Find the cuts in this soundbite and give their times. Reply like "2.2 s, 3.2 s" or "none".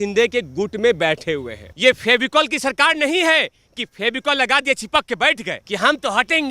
1.6 s, 5.5 s